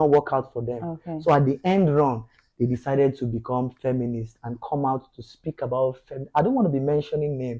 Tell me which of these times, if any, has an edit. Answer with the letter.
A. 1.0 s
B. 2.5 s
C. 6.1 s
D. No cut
D